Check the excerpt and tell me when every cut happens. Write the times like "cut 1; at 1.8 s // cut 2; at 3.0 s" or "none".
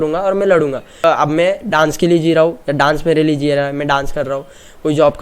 cut 1; at 1.0 s

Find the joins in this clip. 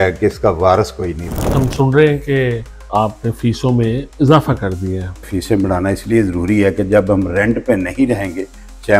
cut 1; at 1.5 s // cut 2; at 5.3 s

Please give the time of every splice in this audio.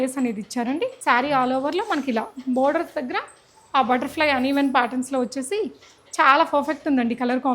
cut 1; at 1.0 s

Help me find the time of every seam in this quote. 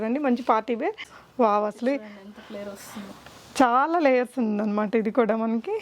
cut 1; at 1.1 s

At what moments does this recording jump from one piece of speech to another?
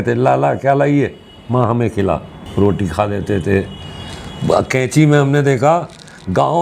none

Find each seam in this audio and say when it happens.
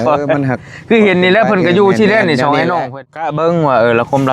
cut 1; at 3.3 s

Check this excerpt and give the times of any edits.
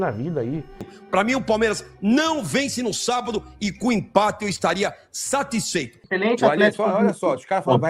cut 1; at 0.9 s // cut 2; at 6.0 s

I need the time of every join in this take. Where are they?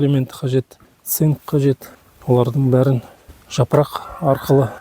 none

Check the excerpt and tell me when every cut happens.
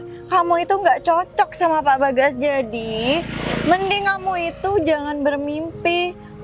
none

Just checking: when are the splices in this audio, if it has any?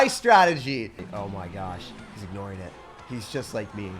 cut 1; at 1.0 s

